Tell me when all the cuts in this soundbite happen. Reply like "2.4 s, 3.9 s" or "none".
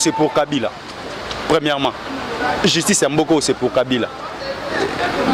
none

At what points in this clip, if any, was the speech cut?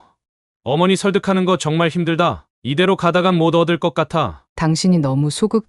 4.4 s

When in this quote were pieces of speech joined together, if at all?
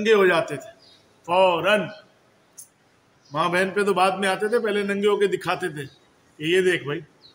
none

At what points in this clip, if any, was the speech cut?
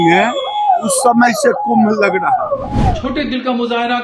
2.7 s

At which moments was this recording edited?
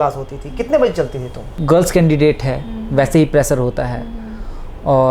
1.5 s

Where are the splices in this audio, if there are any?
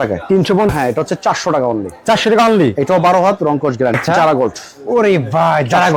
0.7 s, 4.0 s

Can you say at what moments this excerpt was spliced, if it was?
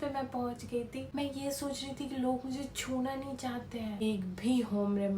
1.1 s, 4.0 s

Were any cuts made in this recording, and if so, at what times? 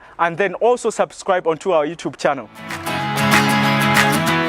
3.1 s

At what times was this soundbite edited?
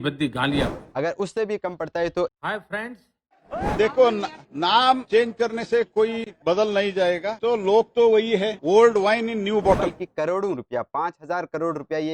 0.9 s, 3.7 s, 9.9 s

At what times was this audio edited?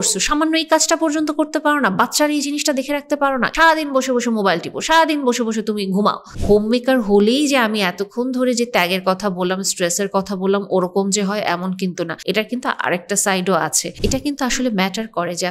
3.5 s, 6.3 s, 12.2 s, 13.8 s

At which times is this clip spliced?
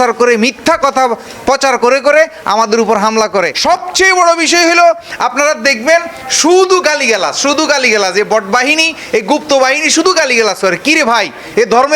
3.5 s

